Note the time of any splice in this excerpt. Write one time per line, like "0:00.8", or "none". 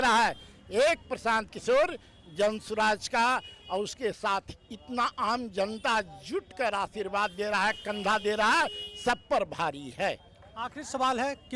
none